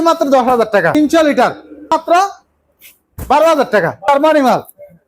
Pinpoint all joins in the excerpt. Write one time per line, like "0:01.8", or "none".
0:00.9
0:01.9
0:04.1